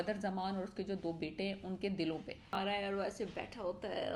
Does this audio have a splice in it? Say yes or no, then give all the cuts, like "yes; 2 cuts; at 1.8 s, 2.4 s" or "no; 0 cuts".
yes; 1 cut; at 2.5 s